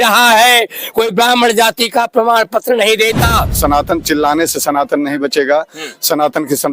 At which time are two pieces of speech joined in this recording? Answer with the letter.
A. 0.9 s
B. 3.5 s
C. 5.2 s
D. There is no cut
B